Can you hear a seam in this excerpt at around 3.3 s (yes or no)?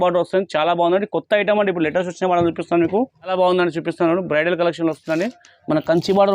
yes